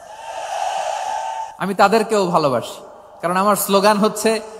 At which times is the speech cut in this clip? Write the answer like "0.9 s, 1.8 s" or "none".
1.5 s